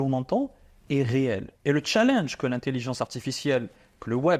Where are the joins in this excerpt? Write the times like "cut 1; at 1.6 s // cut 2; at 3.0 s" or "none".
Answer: cut 1; at 1.5 s